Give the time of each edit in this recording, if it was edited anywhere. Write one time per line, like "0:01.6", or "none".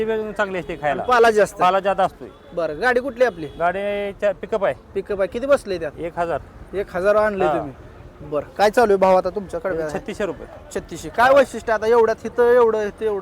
none